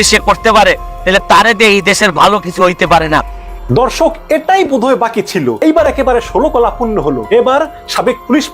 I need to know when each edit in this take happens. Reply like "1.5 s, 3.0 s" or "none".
3.4 s, 5.6 s, 7.2 s

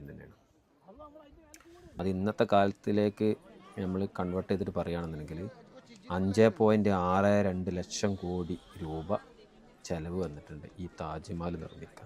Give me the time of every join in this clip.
2.0 s

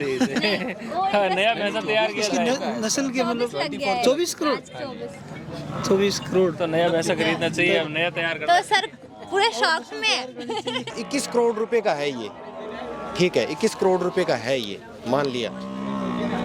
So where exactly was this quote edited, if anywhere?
10.9 s

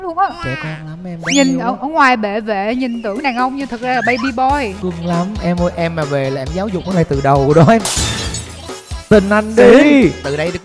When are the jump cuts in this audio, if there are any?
4.8 s

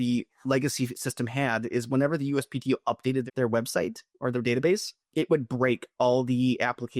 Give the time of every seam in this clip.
3.2 s, 5.0 s

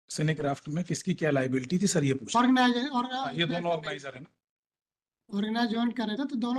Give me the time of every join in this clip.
none

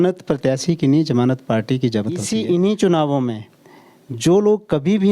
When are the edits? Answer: 2.2 s

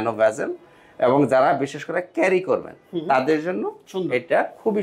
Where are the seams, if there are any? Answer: none

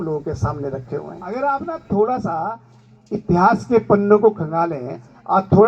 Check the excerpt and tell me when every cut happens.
1.3 s

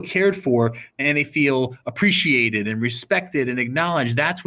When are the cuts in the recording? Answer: 0.9 s

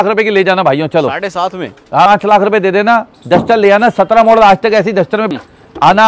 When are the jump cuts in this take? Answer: 2.1 s, 5.2 s

